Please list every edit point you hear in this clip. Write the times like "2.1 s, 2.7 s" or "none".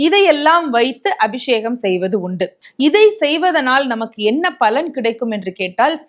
2.6 s